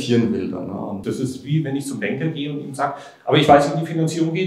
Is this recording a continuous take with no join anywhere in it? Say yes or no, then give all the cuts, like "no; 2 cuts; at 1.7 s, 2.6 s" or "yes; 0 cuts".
no; 1 cut; at 1.0 s